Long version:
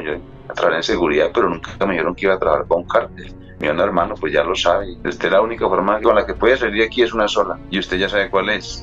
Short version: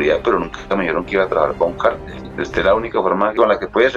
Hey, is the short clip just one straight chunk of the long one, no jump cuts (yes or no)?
no